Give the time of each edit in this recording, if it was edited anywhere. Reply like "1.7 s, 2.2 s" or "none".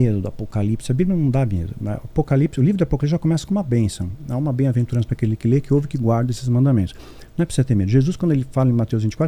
none

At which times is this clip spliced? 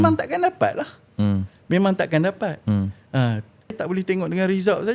3.8 s

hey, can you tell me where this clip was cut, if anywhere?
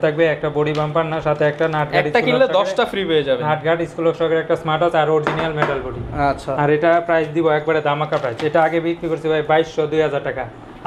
none

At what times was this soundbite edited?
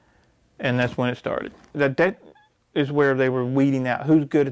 1.7 s

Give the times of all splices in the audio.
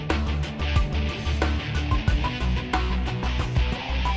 3.1 s

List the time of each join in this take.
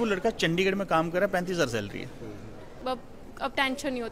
2.8 s

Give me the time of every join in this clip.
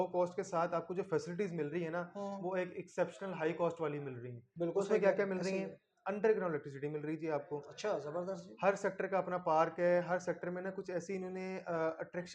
none

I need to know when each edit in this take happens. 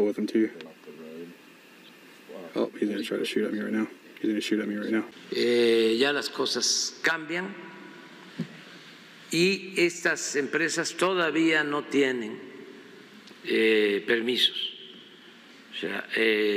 5.2 s

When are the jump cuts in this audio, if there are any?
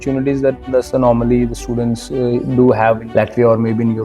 3.0 s

